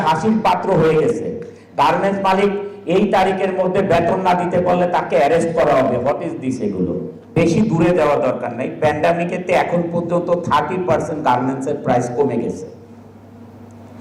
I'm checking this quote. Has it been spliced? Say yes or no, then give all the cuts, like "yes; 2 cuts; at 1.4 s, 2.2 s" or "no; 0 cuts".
yes; 1 cut; at 7.2 s